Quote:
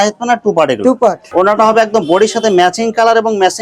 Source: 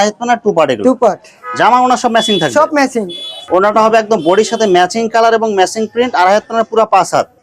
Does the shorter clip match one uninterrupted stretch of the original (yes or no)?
no